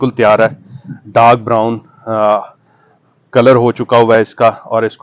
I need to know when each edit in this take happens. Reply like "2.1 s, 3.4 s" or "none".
none